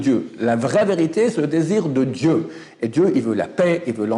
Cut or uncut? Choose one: uncut